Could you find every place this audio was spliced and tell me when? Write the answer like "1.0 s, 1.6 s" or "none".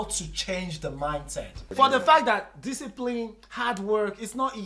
1.7 s